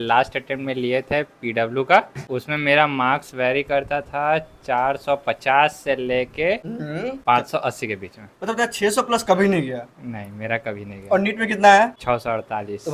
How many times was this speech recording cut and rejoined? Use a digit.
0